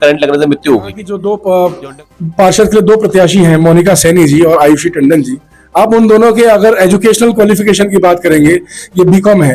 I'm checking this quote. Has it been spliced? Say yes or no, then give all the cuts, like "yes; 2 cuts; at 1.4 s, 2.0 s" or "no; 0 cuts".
yes; 1 cut; at 1.1 s